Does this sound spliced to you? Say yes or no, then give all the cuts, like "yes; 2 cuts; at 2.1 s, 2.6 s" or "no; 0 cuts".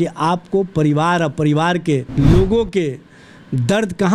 yes; 1 cut; at 2.1 s